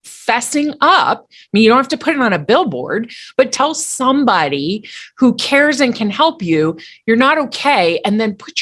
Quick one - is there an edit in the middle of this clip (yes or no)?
yes